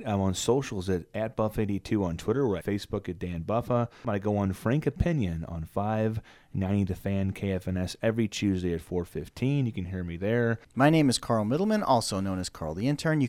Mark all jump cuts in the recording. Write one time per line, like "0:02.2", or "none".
0:02.6
0:04.1
0:10.6